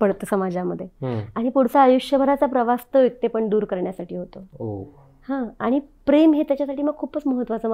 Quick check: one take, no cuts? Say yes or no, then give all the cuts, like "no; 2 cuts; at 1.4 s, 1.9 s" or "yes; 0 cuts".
yes; 0 cuts